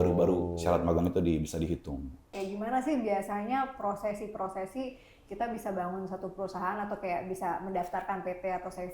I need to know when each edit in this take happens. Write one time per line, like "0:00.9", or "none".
0:02.3